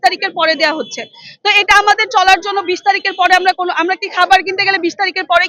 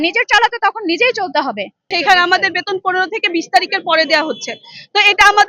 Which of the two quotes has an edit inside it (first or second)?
second